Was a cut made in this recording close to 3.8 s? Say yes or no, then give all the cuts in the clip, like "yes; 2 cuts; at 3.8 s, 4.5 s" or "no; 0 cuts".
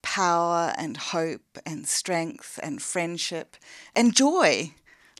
yes; 1 cut; at 3.8 s